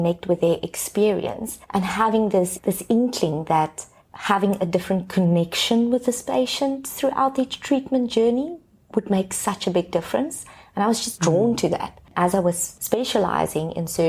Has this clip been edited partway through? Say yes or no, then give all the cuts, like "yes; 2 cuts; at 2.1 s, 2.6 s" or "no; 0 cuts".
no; 0 cuts